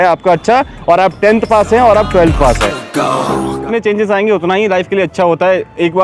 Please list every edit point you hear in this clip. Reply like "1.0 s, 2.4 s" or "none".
3.7 s